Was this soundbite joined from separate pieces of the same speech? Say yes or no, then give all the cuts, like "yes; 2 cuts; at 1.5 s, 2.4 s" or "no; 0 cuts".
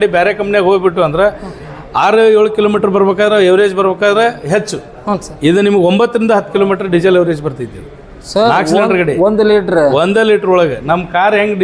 no; 0 cuts